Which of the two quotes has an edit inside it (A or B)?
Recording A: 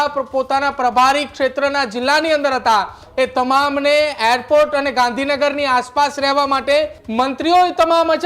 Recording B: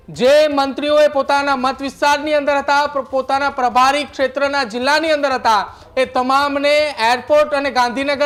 A